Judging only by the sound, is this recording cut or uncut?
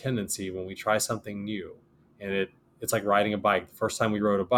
uncut